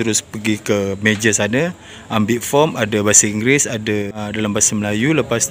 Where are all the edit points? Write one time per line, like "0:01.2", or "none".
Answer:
0:04.1